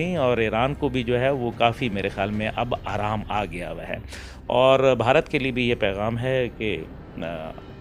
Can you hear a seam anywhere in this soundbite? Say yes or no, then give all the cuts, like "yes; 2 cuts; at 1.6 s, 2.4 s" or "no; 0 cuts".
no; 0 cuts